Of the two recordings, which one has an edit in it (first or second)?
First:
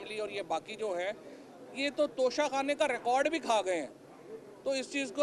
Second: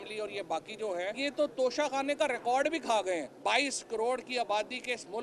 second